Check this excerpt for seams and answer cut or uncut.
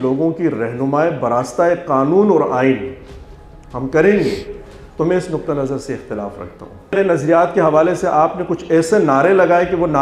cut